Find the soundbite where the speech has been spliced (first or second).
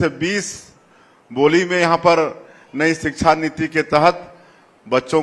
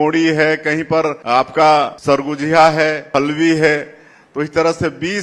second